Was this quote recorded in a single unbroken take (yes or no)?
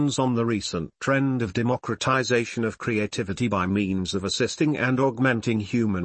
yes